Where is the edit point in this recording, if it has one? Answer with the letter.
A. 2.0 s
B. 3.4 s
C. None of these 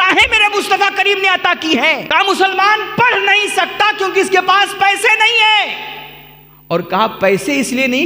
A